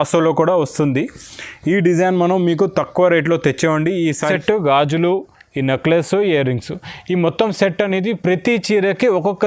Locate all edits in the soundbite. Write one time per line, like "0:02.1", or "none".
0:04.2